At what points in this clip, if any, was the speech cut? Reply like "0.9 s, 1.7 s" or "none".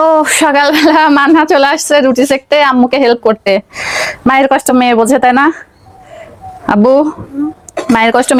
none